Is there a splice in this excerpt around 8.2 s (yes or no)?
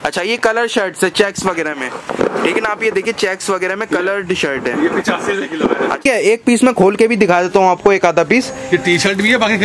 no